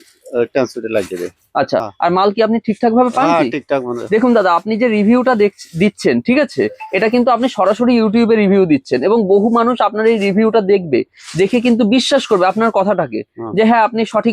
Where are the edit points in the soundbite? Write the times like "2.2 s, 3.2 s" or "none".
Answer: 1.9 s